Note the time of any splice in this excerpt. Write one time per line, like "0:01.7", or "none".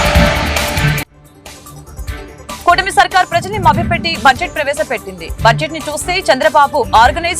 0:02.2